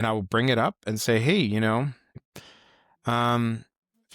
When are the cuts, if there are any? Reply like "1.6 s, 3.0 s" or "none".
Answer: 2.2 s